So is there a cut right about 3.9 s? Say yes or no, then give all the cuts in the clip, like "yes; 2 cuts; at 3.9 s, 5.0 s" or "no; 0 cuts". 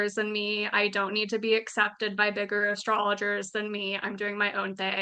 no; 0 cuts